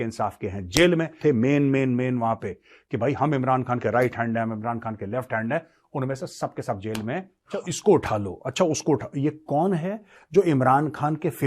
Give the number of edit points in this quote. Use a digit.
2